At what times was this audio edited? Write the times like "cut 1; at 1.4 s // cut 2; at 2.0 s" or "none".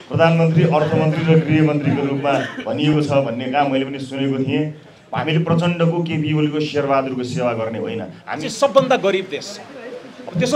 cut 1; at 5.0 s // cut 2; at 8.4 s